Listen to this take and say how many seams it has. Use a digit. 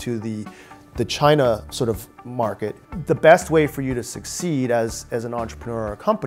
1